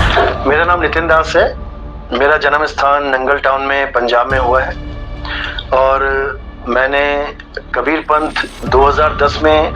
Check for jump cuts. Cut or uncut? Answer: uncut